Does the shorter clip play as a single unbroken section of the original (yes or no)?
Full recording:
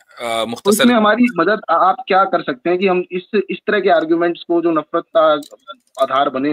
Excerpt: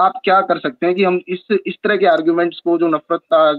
yes